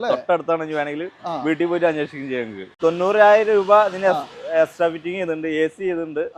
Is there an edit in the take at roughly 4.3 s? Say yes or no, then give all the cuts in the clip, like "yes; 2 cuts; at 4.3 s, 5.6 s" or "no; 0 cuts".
no; 1 cut; at 2.7 s